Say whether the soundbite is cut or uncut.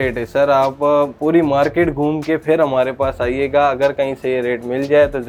uncut